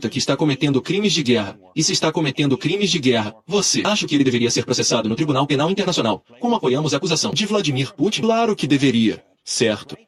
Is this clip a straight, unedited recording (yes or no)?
yes